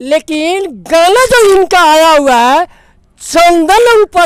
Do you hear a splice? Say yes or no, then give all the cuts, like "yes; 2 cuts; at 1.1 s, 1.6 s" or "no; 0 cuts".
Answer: no; 0 cuts